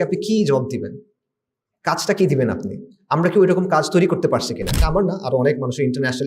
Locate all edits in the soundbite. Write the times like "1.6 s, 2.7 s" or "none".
4.8 s